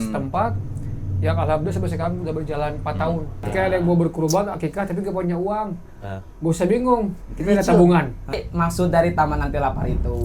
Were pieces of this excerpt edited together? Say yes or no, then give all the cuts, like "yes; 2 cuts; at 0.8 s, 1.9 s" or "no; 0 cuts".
yes; 2 cuts; at 3.5 s, 8.4 s